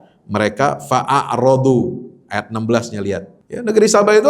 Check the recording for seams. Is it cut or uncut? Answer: cut